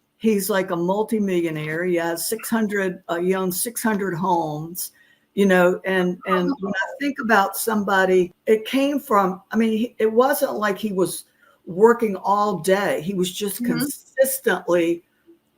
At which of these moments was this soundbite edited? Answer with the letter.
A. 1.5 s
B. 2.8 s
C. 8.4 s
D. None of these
C